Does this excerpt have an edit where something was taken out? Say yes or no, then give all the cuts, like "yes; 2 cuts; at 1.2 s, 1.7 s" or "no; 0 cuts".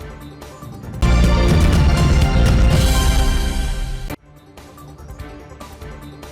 yes; 1 cut; at 1.0 s